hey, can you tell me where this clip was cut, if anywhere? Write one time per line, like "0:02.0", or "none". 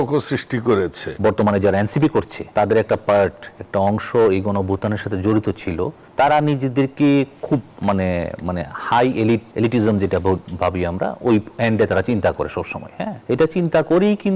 0:01.0
0:02.4
0:06.0
0:07.7
0:09.5
0:13.2